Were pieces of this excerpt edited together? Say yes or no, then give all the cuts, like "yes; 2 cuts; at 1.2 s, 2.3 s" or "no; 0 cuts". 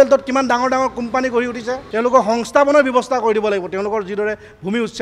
yes; 1 cut; at 1.8 s